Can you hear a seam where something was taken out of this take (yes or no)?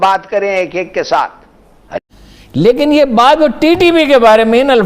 yes